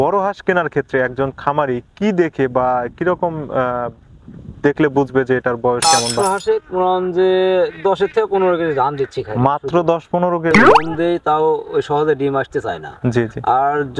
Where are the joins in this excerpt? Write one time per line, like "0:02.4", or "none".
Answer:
0:05.9
0:10.6